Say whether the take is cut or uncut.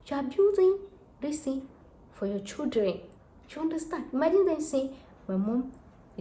uncut